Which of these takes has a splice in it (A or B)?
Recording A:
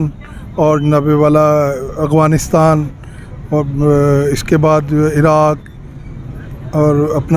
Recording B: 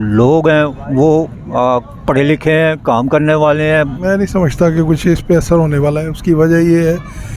B